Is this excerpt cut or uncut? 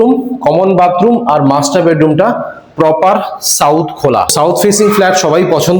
cut